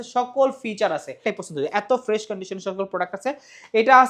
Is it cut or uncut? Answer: cut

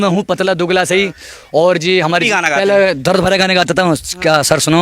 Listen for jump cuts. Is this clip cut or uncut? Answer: cut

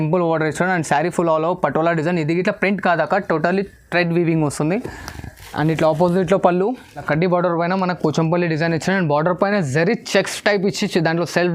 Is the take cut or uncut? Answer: cut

